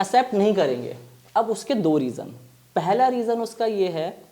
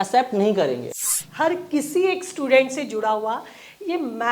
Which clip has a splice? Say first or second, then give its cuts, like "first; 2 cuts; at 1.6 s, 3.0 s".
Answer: second; 1 cut; at 1.2 s